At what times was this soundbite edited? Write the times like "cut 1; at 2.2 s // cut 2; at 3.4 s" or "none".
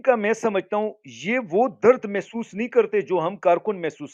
none